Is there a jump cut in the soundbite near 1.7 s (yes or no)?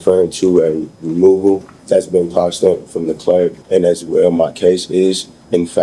yes